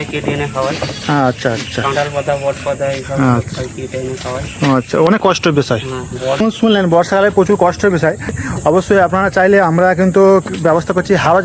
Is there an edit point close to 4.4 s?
no; 2 cuts; at 6.4 s, 8.4 s

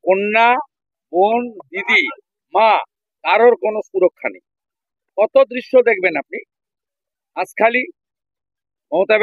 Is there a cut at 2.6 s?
no; 0 cuts

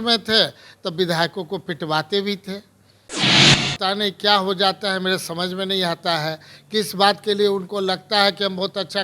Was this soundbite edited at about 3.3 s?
yes; 1 cut; at 3.3 s

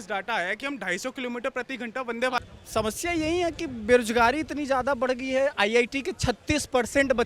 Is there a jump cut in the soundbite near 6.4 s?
no; 1 cut; at 2.4 s

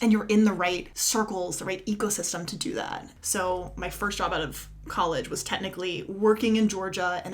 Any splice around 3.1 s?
yes; 2 cuts; at 0.9 s, 3.1 s

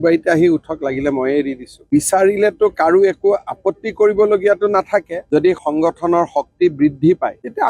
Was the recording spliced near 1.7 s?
yes; 2 cuts; at 1.7 s, 5.2 s

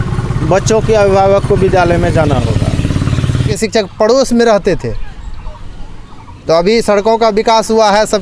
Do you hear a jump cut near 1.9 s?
no; 1 cut; at 3.5 s

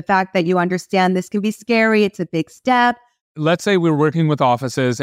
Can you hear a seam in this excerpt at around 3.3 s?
yes; 1 cut; at 3.3 s

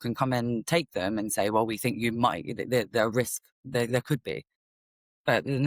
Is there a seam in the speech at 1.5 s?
no; 0 cuts

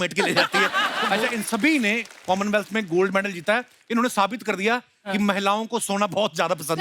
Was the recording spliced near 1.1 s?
yes; 1 cut; at 1.1 s

